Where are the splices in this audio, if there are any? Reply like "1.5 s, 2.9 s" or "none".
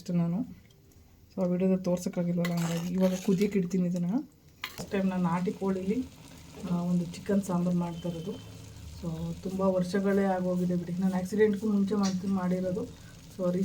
4.8 s